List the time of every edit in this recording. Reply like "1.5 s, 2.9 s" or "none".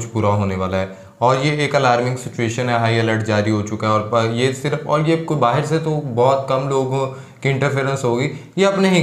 none

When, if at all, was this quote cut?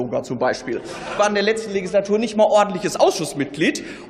1.1 s

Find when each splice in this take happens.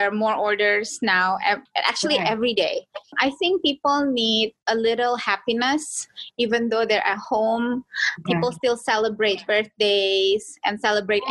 1.7 s, 3.1 s, 4.6 s

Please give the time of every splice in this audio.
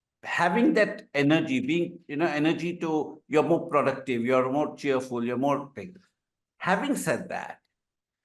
none

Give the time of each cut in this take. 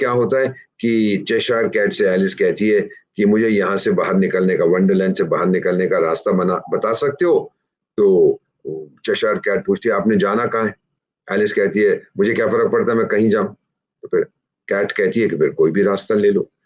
none

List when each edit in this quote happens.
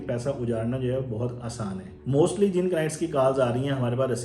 1.9 s

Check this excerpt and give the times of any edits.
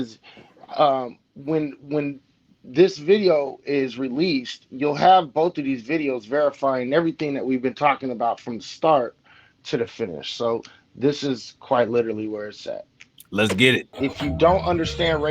13.9 s

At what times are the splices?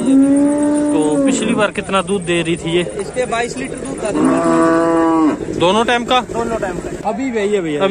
6.9 s

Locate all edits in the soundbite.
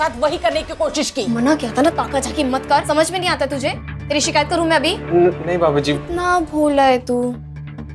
1.3 s, 2.8 s, 6.0 s

